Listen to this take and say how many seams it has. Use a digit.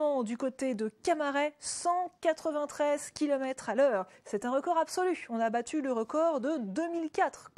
1